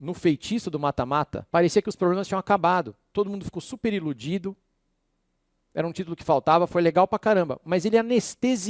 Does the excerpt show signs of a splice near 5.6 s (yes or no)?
no